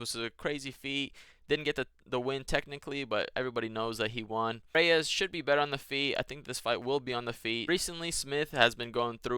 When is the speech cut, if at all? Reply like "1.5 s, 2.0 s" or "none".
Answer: none